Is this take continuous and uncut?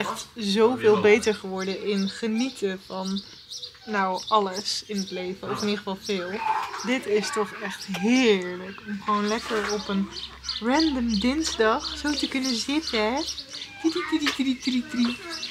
yes; 0 cuts

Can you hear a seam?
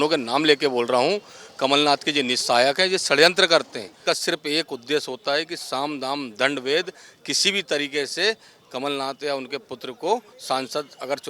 yes; 1 cut; at 3.9 s

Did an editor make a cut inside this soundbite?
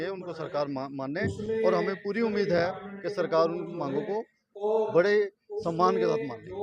no; 0 cuts

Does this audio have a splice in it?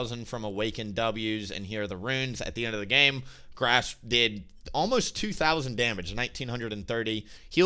no; 0 cuts

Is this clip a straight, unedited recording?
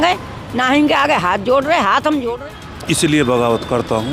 no; 1 cut; at 2.3 s

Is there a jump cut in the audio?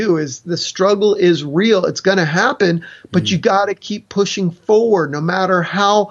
no; 0 cuts

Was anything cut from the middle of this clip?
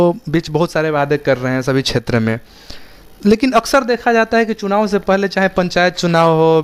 no; 0 cuts

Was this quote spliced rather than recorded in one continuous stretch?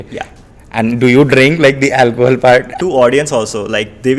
yes; 1 cut; at 2.7 s

